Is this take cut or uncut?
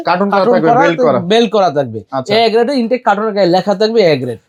uncut